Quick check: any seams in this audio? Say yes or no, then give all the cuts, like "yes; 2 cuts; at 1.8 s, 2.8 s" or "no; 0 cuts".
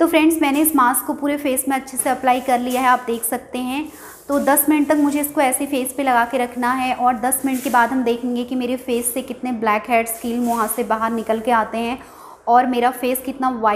no; 0 cuts